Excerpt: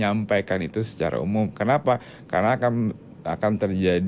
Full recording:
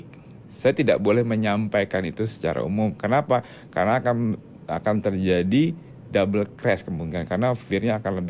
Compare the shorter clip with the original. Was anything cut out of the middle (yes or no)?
no